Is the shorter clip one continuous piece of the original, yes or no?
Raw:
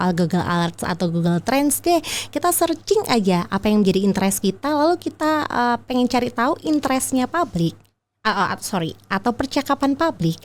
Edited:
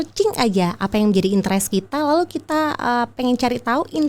yes